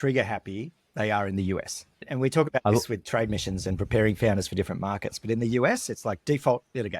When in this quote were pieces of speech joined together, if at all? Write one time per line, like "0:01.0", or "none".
none